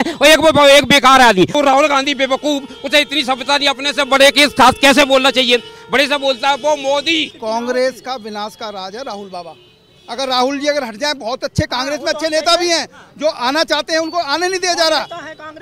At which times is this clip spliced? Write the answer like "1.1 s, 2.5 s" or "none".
1.5 s, 7.3 s

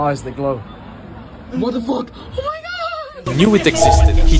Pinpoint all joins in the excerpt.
3.2 s

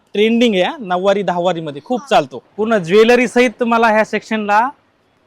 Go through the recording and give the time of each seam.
2.4 s

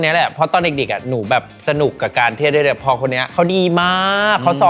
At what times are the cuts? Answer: 3.2 s

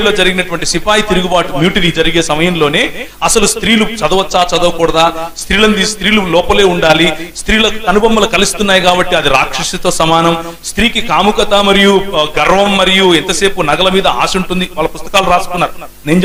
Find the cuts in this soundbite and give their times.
none

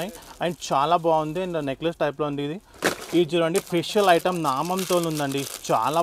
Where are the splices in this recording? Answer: 2.6 s

